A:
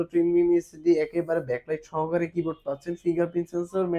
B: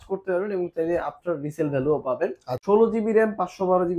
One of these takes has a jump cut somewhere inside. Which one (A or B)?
B